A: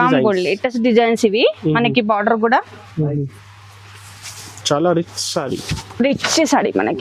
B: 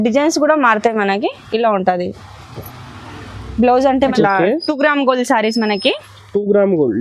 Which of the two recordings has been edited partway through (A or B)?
B